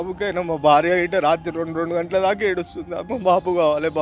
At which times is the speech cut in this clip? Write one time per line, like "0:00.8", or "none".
0:03.0